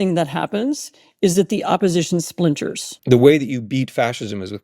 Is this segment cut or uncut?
cut